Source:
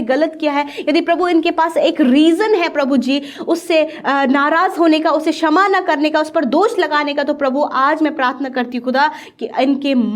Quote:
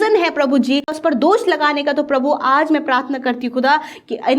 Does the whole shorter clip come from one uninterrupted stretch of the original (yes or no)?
no